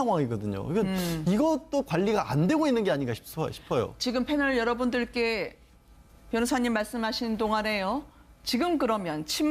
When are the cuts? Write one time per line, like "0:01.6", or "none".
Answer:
none